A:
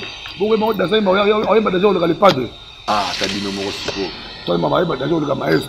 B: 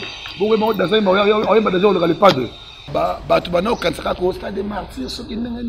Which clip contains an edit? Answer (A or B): B